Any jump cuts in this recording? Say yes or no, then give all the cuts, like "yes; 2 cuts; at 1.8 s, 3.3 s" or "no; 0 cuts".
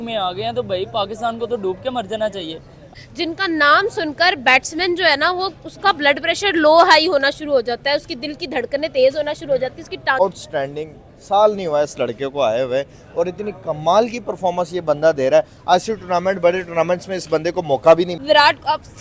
yes; 3 cuts; at 2.9 s, 10.2 s, 18.2 s